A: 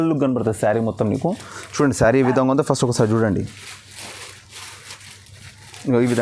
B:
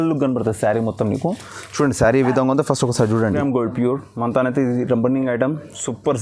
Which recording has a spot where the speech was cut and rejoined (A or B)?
B